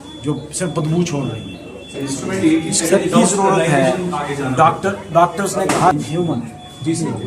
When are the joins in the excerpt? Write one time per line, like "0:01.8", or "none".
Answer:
none

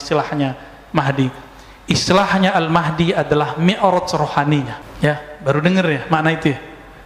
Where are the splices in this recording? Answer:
0:04.8

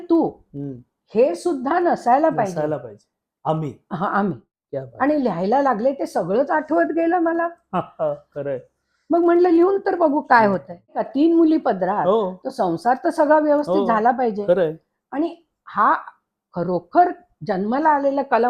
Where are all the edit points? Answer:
0:04.5
0:11.0

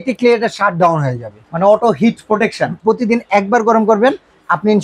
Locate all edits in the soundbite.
0:02.8

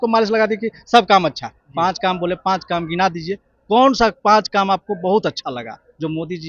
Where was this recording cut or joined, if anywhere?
none

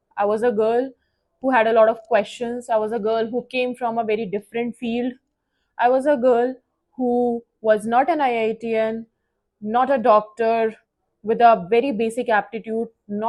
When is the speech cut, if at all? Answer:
none

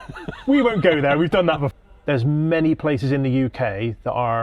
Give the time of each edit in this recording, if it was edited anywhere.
0:01.7

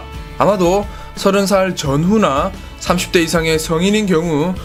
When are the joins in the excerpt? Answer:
none

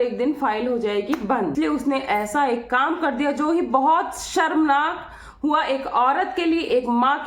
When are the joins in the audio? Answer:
0:01.5

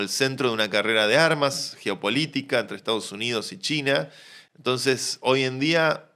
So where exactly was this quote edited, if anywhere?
none

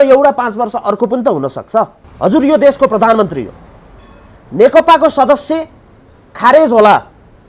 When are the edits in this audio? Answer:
0:02.0

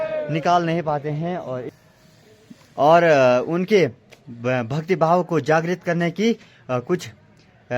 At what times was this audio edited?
0:01.7

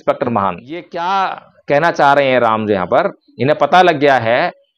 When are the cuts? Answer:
0:00.9

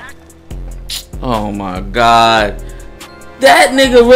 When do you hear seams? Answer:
none

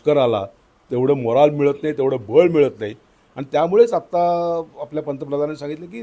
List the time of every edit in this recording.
none

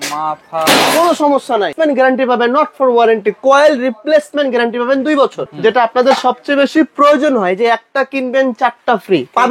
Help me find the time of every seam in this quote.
0:01.7
0:05.5

